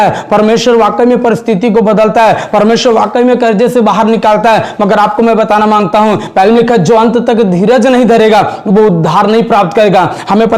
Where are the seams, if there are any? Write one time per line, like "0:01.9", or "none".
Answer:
none